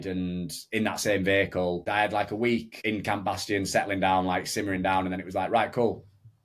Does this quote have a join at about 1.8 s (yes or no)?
yes